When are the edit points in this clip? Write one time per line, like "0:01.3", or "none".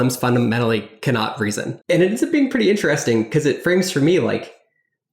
0:01.7